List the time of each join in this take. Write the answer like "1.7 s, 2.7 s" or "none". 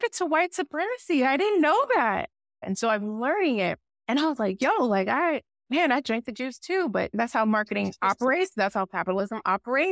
2.6 s, 3.9 s, 5.5 s, 7.1 s

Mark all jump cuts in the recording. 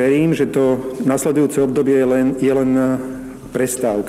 none

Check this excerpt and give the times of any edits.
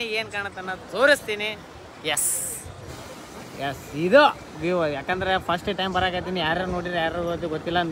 none

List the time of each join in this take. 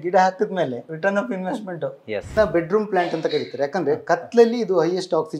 0.9 s, 2.3 s

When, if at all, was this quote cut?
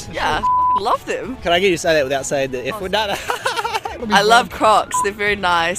1.3 s

